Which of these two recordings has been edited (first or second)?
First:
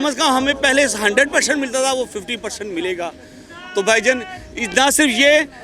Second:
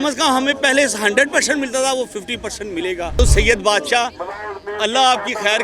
second